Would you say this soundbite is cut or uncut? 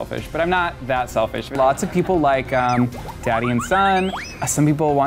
cut